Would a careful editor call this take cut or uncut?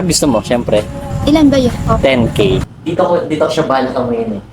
cut